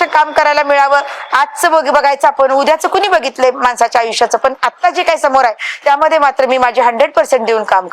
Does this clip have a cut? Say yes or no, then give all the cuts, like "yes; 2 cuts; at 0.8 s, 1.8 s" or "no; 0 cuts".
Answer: no; 0 cuts